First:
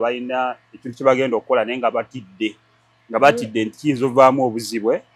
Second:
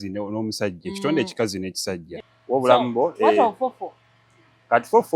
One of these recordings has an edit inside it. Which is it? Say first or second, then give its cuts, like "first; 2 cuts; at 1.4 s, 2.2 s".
second; 1 cut; at 2.1 s